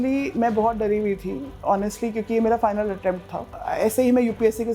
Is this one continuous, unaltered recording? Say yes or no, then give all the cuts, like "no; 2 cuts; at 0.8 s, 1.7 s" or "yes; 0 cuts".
no; 1 cut; at 3.6 s